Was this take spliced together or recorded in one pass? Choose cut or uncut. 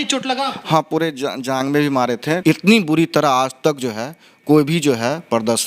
cut